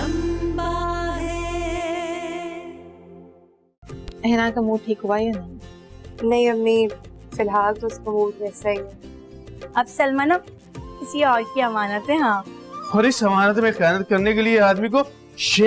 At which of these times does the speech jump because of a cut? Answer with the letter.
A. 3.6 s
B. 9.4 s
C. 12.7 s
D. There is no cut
A